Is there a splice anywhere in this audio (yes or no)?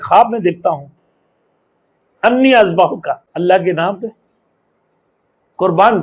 yes